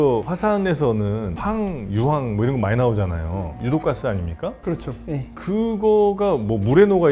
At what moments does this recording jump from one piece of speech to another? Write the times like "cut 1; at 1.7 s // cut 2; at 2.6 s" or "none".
none